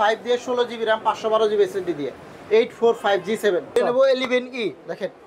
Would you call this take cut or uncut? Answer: cut